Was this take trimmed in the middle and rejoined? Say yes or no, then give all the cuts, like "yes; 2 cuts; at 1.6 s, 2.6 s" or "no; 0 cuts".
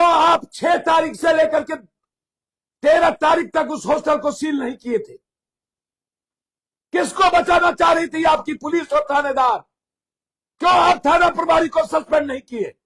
no; 0 cuts